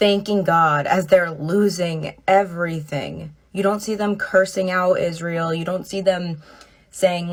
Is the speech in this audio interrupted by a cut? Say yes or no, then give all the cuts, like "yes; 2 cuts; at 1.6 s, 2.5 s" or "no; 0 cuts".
no; 0 cuts